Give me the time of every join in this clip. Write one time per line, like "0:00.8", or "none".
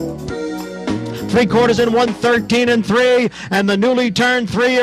0:01.2